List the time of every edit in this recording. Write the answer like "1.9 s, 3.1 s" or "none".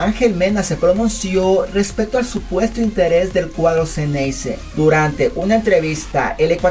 none